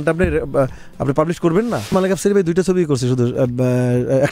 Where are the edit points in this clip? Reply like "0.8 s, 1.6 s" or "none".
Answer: 1.9 s

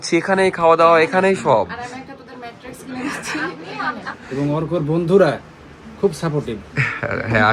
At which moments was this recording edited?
4.1 s

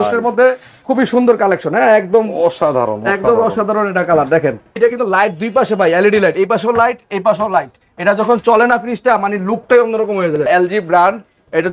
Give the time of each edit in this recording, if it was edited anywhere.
4.8 s, 10.5 s

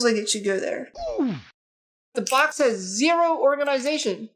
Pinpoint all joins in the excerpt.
0.9 s, 2.1 s

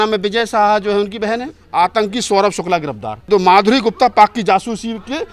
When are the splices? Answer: 1.6 s, 3.3 s

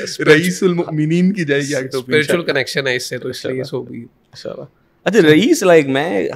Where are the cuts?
none

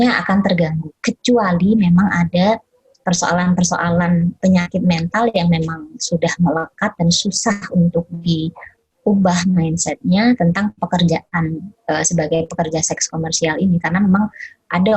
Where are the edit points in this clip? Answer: 4.4 s

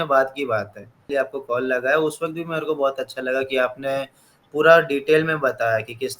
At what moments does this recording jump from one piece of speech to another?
1.0 s

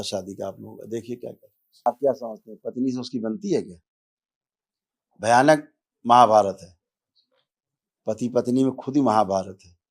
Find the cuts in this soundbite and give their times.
1.9 s

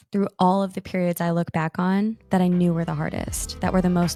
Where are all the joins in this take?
none

